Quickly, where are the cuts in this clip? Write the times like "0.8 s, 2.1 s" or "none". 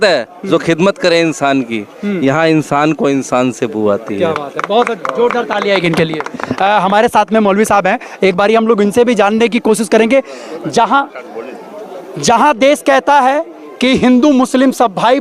none